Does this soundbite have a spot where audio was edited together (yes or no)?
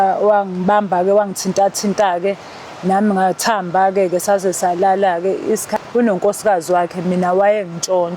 yes